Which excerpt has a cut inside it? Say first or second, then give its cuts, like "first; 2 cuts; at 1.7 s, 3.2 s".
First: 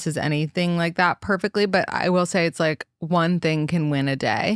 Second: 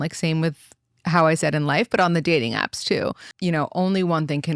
second; 1 cut; at 3.3 s